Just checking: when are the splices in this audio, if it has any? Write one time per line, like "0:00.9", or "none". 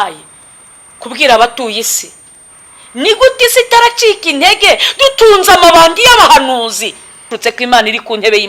0:07.3

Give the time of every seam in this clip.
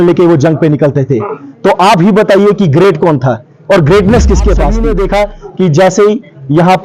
0:04.8

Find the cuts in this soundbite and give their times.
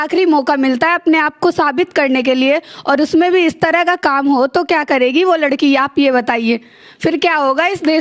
none

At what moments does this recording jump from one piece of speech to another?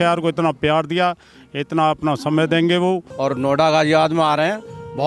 0:03.1

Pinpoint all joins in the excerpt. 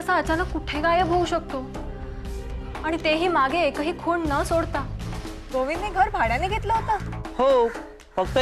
none

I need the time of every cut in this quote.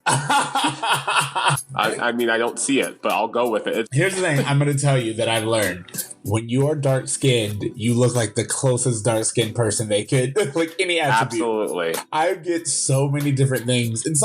0:01.6
0:03.9
0:12.0

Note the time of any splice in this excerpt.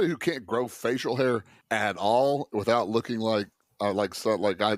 0:01.6

